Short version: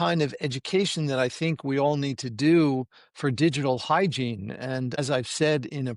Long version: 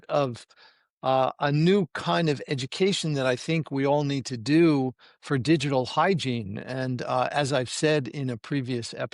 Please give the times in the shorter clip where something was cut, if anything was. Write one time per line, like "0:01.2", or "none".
0:05.0